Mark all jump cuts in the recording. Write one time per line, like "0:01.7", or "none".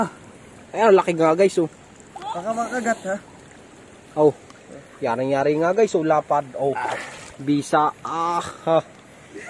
none